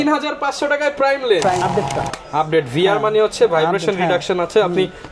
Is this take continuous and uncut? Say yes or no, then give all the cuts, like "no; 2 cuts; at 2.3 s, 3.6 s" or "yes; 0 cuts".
no; 1 cut; at 1.6 s